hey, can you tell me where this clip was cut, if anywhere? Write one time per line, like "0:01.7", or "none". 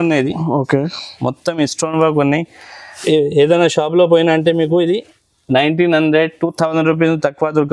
0:02.9